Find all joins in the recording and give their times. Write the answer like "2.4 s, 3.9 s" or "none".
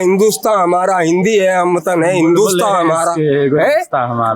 none